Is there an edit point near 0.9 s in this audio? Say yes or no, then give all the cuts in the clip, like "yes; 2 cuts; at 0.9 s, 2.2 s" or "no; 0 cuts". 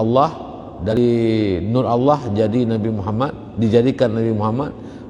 yes; 1 cut; at 0.9 s